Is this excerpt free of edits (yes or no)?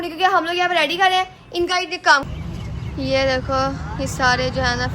no